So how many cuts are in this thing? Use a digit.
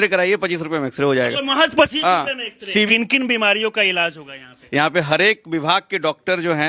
2